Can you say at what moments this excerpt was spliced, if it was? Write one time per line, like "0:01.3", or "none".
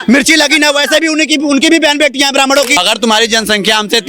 0:02.7